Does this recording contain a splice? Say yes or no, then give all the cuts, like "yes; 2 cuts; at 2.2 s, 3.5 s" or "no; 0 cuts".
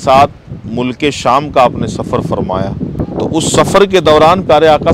yes; 1 cut; at 3.0 s